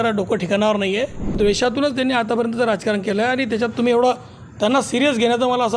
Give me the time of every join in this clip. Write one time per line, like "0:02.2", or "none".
0:01.3

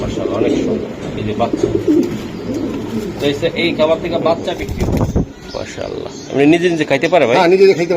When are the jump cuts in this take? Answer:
0:04.7

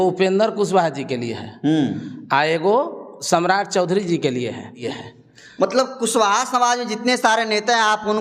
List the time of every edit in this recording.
0:04.8

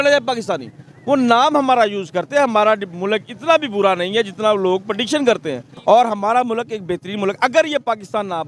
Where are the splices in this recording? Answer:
0:02.1
0:05.7

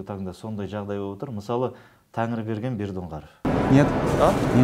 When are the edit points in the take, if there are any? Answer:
0:03.5

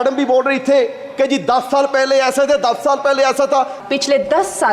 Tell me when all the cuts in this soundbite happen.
0:03.8

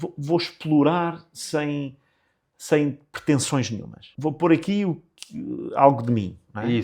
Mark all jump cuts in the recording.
0:04.0

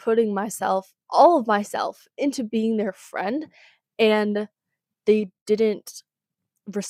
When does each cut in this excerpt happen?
none

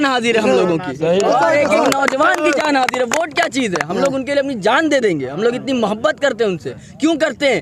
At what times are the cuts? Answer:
none

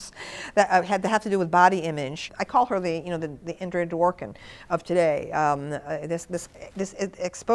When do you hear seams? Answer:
0:02.3

